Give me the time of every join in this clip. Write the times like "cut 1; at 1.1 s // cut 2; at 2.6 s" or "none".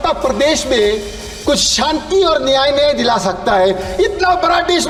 none